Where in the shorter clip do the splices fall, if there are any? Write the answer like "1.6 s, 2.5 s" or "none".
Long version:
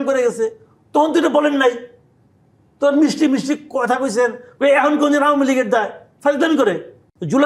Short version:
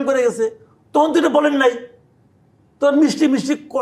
none